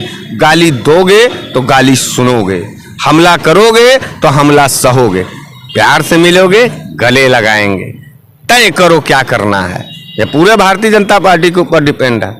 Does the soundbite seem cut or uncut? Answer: uncut